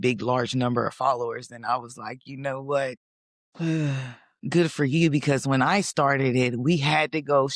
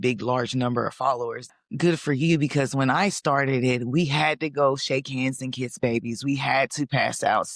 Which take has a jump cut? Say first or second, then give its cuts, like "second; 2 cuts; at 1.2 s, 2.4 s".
second; 1 cut; at 1.5 s